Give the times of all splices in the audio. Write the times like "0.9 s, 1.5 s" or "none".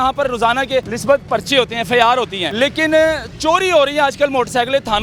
0.9 s, 2.4 s